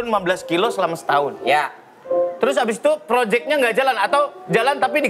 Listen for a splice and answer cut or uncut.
uncut